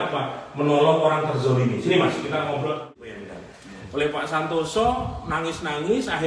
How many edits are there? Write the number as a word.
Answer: one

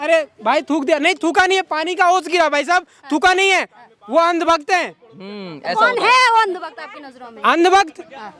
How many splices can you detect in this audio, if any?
zero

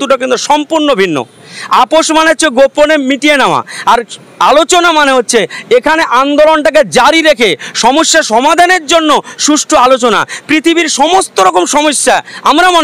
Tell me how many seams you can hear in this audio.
zero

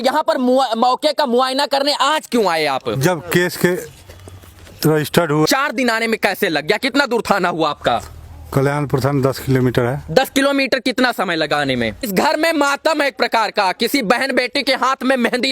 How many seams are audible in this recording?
two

